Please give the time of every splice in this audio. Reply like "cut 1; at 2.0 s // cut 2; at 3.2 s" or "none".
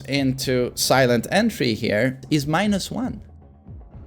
cut 1; at 2.2 s